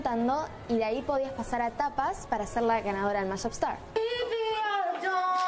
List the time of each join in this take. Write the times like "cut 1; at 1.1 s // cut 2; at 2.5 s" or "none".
cut 1; at 3.8 s